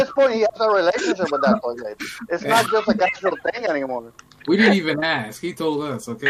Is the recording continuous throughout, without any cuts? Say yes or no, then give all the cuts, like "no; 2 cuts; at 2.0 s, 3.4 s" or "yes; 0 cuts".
yes; 0 cuts